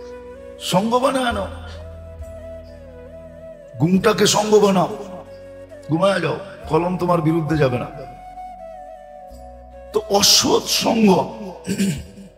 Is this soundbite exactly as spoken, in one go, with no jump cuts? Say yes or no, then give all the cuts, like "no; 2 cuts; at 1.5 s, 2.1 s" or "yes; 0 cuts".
no; 2 cuts; at 1.5 s, 3.7 s